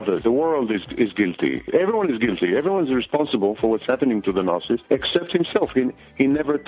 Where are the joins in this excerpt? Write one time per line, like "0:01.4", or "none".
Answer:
0:01.7
0:04.8